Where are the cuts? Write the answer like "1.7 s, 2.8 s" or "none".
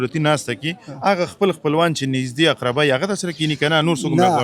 none